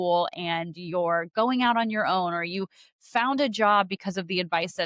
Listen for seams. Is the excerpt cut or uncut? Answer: uncut